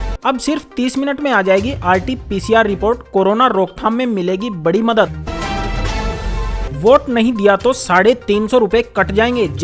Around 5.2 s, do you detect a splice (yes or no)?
yes